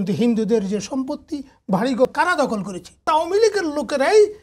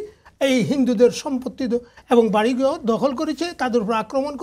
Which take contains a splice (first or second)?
first